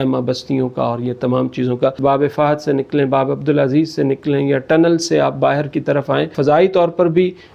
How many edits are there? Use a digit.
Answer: 2